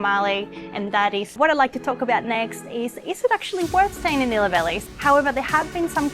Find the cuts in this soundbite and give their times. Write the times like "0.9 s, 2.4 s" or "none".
1.3 s, 4.8 s